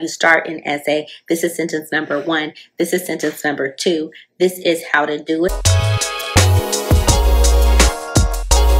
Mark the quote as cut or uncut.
cut